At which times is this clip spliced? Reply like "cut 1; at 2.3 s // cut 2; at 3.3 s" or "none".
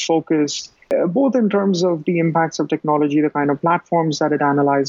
cut 1; at 0.9 s